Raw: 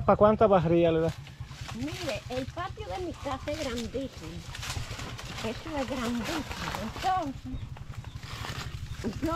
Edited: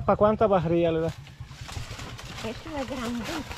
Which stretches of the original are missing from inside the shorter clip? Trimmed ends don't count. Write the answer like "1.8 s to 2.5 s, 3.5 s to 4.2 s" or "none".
1.6 s to 4.6 s